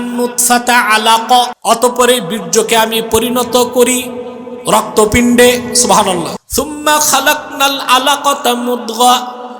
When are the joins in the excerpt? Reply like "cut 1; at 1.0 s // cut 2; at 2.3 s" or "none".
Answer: cut 1; at 1.5 s // cut 2; at 6.4 s